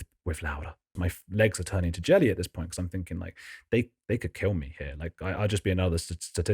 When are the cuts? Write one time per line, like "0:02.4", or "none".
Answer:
0:00.9